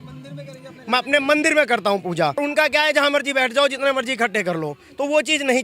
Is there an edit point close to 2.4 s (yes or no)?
yes